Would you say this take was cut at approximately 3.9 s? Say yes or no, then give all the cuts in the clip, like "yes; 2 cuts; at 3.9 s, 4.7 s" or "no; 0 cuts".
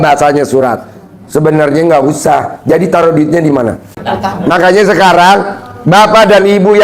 yes; 1 cut; at 3.9 s